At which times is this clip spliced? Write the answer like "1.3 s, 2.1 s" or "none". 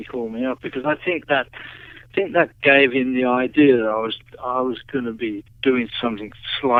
none